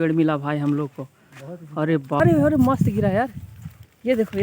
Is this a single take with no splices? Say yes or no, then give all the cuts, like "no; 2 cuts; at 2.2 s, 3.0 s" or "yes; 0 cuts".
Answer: no; 1 cut; at 2.2 s